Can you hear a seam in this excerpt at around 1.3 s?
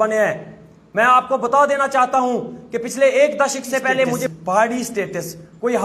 no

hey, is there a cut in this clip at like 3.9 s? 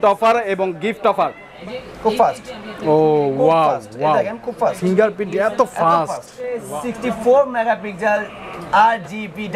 no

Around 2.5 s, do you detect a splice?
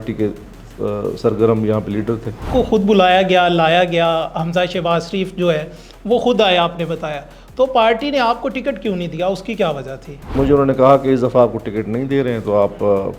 yes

